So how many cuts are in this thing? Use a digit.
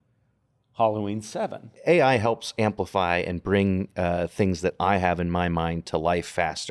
1